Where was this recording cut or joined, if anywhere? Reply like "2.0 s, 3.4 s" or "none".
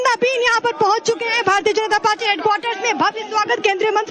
none